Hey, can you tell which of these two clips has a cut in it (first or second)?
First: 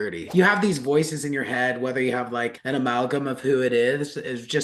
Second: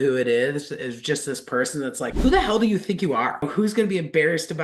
second